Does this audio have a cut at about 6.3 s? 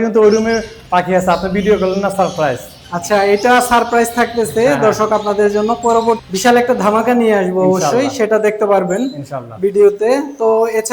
yes; 1 cut; at 6.3 s

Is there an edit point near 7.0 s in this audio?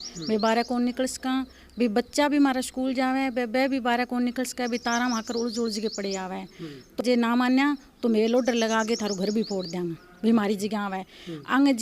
yes; 1 cut; at 7.0 s

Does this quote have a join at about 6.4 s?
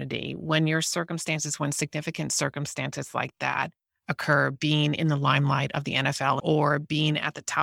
yes; 1 cut; at 6.4 s

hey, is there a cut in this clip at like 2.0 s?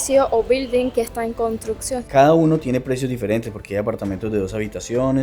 yes; 1 cut; at 2.0 s

